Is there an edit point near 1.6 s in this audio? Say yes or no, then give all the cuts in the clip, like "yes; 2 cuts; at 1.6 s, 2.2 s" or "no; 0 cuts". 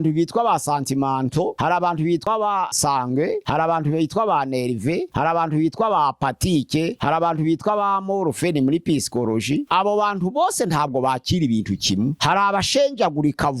yes; 1 cut; at 1.6 s